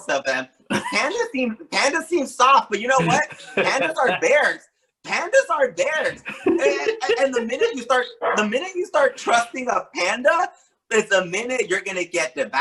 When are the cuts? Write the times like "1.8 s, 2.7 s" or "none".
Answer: none